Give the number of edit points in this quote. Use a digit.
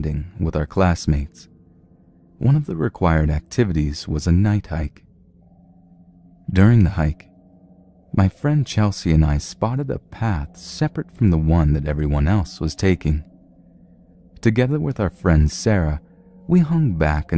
0